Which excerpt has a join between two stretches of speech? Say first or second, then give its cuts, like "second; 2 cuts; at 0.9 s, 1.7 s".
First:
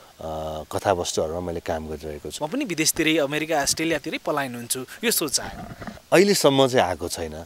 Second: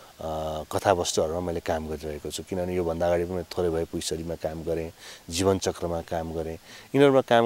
first; 2 cuts; at 2.2 s, 6.0 s